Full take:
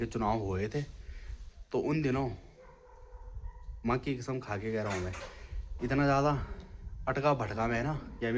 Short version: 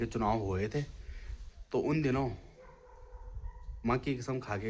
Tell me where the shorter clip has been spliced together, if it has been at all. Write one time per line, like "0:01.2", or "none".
none